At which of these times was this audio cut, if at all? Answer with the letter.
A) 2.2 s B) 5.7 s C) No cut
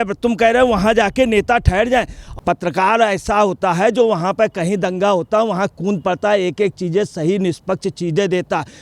A